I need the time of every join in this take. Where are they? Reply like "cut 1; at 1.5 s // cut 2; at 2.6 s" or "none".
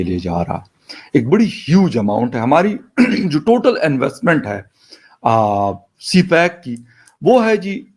none

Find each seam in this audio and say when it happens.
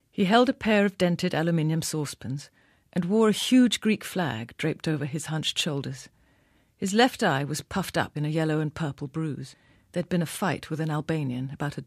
cut 1; at 8.6 s

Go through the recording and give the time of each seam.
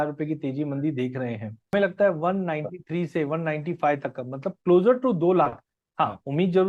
cut 1; at 1.7 s

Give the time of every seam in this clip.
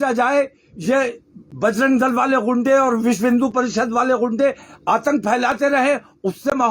none

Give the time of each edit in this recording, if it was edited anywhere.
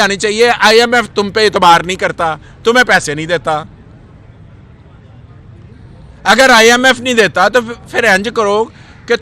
none

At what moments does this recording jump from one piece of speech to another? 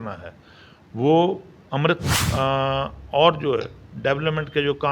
cut 1; at 2.1 s

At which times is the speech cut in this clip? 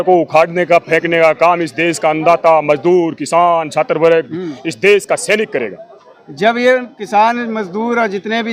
none

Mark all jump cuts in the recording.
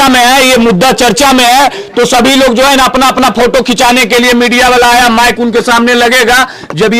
none

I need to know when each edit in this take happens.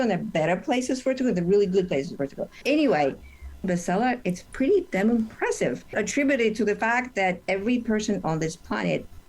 cut 1; at 2.5 s // cut 2; at 3.6 s // cut 3; at 5.9 s

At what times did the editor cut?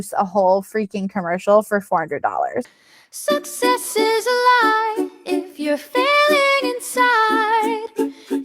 cut 1; at 2.7 s

